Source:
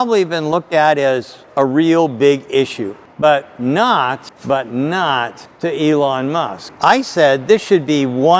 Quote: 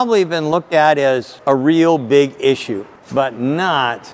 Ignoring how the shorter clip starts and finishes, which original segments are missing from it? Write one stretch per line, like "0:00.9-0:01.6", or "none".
0:01.3-0:01.4
0:03.0-0:04.3